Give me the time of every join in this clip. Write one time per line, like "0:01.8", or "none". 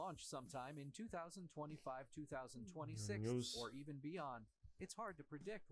0:04.3